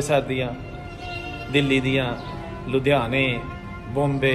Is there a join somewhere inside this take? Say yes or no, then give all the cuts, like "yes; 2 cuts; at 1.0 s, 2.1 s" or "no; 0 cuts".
no; 0 cuts